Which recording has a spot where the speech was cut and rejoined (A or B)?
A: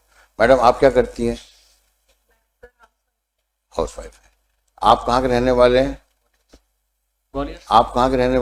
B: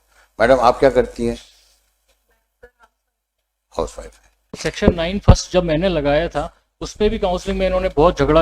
B